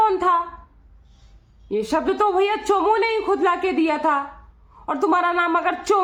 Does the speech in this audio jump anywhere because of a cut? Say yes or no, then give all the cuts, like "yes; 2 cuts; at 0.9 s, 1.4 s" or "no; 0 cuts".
no; 0 cuts